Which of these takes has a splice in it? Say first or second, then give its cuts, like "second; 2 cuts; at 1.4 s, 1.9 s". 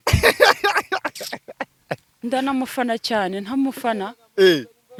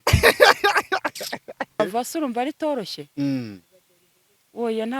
second; 1 cut; at 1.8 s